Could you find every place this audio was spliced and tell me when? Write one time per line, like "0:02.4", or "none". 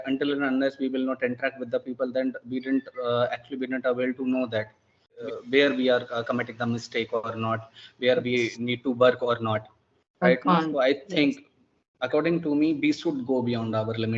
0:05.2